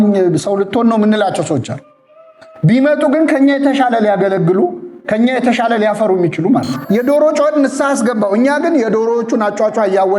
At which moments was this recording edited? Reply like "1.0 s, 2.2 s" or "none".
6.8 s